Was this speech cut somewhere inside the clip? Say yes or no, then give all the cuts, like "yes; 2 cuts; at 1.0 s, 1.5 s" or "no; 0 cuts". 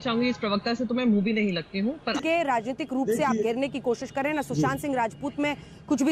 yes; 1 cut; at 2.2 s